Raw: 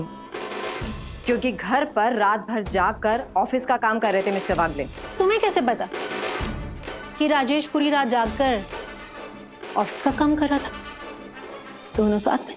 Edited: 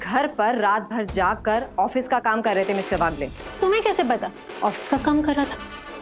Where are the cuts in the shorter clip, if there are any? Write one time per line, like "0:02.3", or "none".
0:04.4